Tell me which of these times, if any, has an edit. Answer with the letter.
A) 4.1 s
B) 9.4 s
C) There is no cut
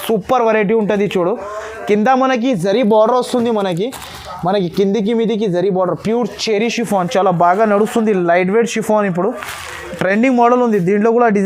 C